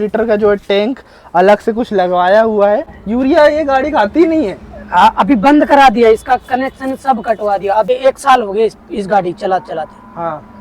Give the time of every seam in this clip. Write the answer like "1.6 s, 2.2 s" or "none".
3.0 s, 7.9 s